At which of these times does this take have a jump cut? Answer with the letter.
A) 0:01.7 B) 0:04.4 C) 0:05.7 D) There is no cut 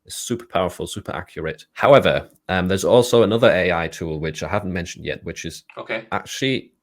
A